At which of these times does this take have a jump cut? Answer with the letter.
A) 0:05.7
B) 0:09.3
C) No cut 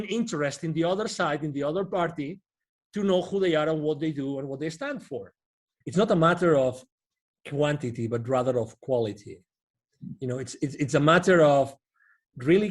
A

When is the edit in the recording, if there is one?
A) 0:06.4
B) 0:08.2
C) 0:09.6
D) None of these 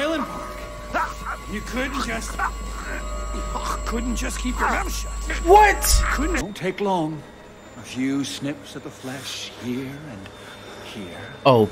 A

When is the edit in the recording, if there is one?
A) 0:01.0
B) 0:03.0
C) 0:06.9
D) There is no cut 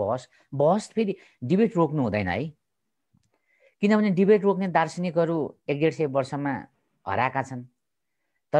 D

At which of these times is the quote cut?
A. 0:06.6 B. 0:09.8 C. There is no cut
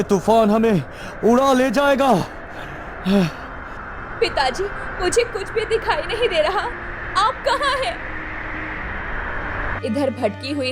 B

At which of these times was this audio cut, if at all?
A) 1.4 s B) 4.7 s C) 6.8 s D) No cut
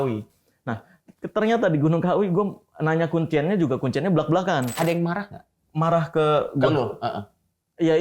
B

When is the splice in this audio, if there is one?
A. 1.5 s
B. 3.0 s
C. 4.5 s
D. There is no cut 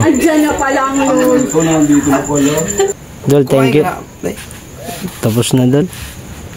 B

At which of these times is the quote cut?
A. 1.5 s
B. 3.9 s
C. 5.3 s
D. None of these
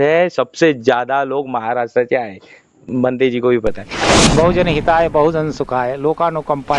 B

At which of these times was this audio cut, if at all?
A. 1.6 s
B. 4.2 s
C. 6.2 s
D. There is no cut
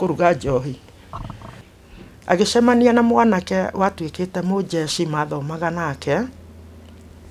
A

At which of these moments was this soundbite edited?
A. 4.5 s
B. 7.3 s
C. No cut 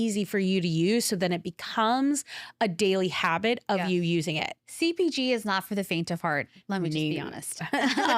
A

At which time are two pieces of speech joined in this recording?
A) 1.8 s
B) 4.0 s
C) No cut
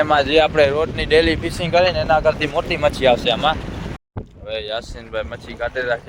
B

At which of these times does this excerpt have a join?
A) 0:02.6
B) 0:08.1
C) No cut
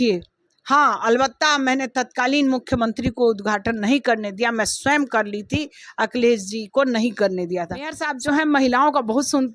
B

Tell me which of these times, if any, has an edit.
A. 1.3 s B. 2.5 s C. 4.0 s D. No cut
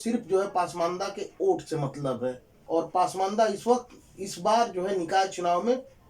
B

